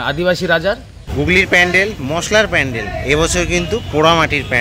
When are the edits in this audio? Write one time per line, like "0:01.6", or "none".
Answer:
0:01.1